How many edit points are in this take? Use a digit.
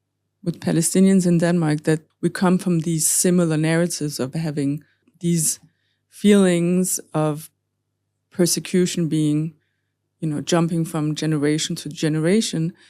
2